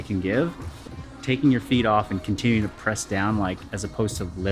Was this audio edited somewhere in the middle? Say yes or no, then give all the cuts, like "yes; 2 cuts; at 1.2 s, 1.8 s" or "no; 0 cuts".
yes; 1 cut; at 1.1 s